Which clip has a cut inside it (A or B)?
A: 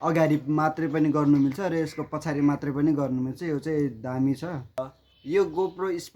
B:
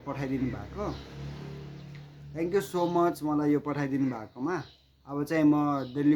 A